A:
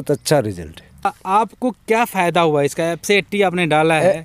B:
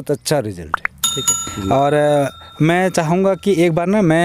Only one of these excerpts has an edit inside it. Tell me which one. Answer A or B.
A